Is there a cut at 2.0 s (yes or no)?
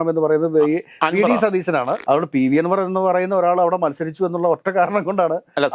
yes